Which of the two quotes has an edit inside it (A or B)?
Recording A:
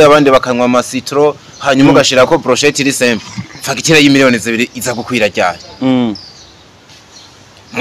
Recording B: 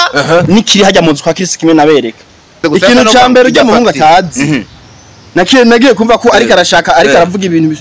B